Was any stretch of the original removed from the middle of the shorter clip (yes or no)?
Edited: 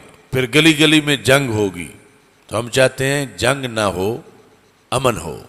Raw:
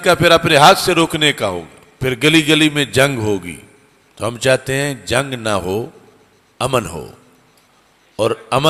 no